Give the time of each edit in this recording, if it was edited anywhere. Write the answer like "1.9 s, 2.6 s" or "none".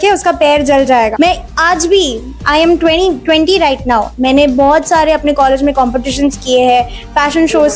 1.1 s